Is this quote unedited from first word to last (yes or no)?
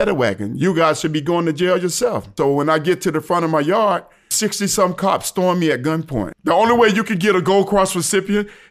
no